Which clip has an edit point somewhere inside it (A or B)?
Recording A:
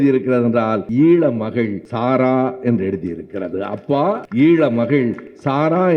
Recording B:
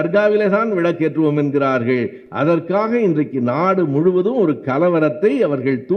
A